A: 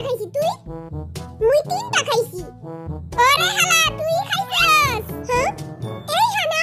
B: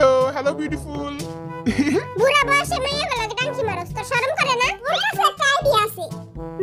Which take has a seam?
B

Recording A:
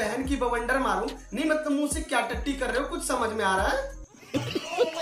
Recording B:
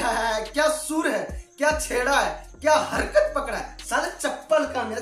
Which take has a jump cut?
A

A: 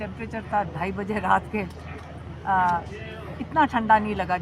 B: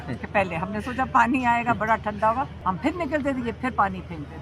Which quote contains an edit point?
B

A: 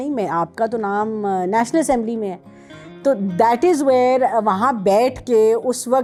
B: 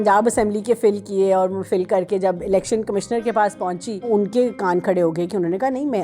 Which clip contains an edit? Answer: B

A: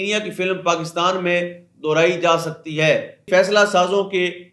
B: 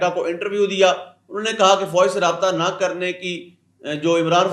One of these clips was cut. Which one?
A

